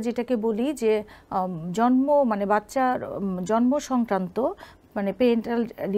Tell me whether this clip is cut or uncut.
uncut